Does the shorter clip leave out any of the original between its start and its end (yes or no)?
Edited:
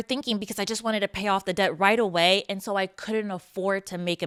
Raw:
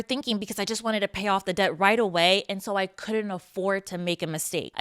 no